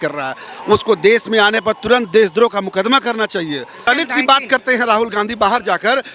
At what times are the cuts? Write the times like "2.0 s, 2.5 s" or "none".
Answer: 3.8 s